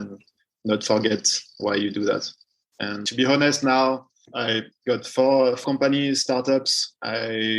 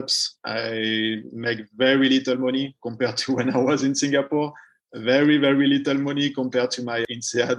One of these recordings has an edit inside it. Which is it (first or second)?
first